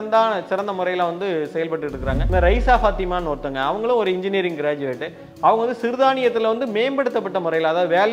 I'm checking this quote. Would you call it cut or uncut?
cut